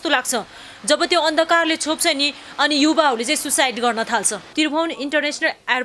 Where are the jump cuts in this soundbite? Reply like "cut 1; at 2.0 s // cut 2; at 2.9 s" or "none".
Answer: cut 1; at 4.5 s